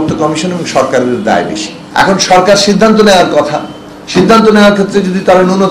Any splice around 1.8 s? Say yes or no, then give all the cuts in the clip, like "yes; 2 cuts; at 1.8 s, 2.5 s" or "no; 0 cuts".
yes; 1 cut; at 1.8 s